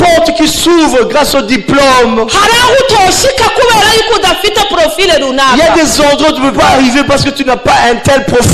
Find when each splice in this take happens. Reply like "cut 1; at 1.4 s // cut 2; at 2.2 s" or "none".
none